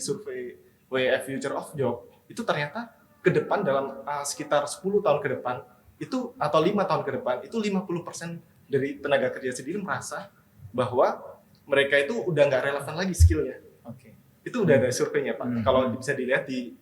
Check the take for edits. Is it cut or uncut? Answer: uncut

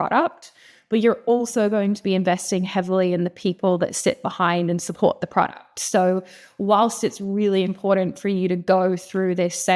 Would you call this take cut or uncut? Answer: uncut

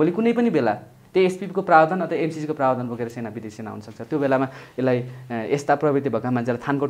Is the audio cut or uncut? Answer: uncut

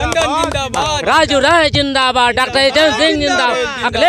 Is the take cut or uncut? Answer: uncut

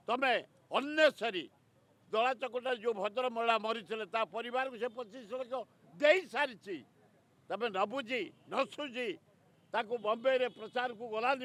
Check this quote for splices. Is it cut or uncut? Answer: uncut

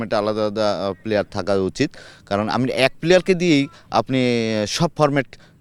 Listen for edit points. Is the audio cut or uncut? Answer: uncut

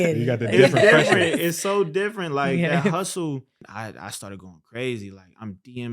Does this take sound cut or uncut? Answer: cut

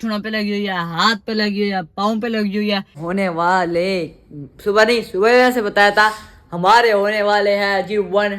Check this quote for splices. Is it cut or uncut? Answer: cut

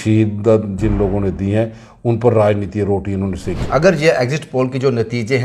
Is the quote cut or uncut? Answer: cut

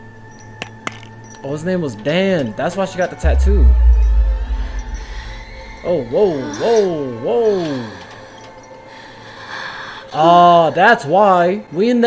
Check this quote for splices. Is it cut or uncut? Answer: uncut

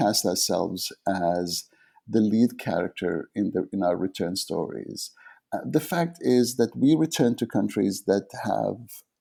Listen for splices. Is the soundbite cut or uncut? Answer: uncut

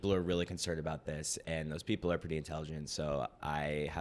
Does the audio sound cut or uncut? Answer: uncut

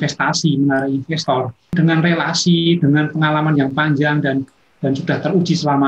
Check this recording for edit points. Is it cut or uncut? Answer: cut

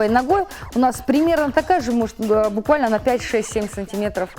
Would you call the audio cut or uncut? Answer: uncut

